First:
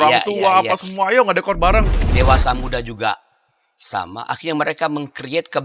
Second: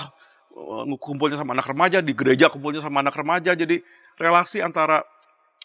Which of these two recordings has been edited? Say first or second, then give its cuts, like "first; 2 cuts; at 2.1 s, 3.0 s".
first; 1 cut; at 2.0 s